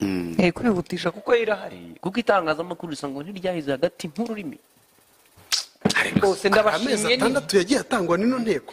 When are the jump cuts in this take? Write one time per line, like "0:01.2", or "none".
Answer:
0:05.7